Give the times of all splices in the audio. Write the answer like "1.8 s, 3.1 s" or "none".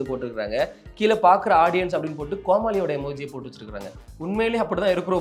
none